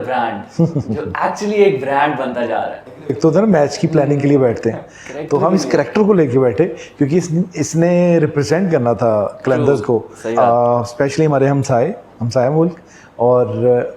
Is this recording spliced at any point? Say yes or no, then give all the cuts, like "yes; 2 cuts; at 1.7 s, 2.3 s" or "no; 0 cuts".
yes; 2 cuts; at 3.2 s, 10.2 s